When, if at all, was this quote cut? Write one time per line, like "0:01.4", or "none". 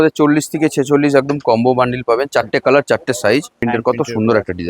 0:03.6